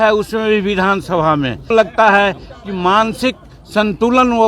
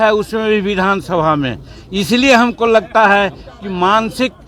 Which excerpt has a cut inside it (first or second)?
first